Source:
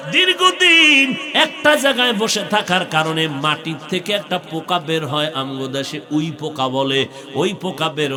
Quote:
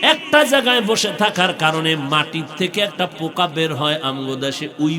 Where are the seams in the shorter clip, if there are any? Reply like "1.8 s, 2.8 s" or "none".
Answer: none